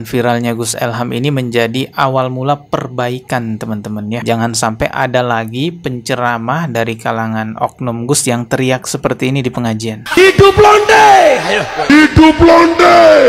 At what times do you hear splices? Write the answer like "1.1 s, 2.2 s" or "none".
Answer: none

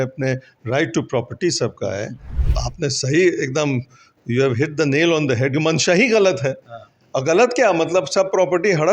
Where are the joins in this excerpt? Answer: 2.5 s

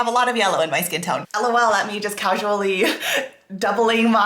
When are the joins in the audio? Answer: 1.3 s

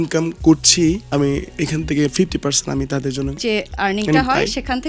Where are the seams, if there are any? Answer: 1.0 s, 3.3 s

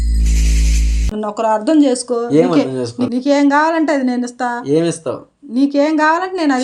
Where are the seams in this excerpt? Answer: 1.0 s, 3.0 s

